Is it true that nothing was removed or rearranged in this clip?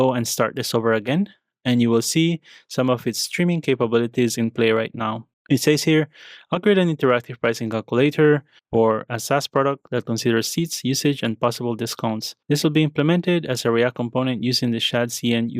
no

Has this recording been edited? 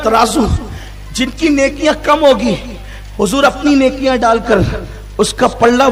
no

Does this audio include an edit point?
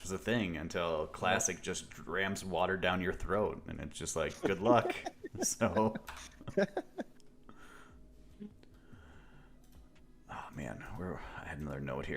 no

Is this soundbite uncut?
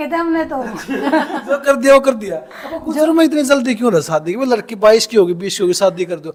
yes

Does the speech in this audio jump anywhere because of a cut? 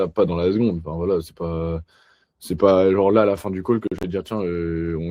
no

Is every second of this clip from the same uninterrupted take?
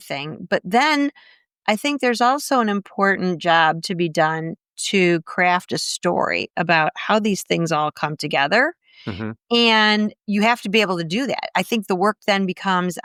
yes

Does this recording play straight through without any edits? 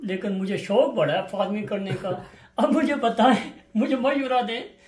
yes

